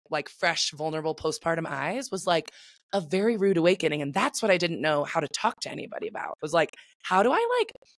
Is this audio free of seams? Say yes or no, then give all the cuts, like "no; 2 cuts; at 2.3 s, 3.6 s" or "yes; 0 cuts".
no; 1 cut; at 6.3 s